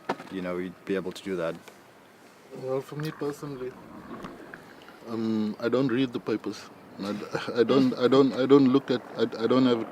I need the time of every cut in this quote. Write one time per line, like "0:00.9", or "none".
0:06.1